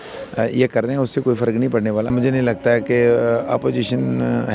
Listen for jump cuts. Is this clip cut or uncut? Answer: cut